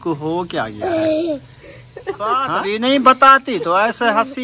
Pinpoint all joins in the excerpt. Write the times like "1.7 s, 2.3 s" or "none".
2.5 s